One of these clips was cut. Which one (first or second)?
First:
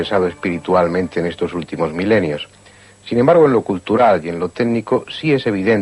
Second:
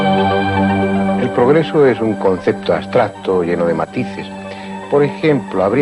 first